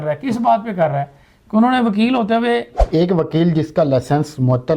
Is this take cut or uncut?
cut